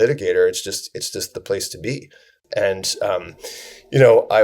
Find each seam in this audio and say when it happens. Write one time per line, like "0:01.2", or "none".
0:02.4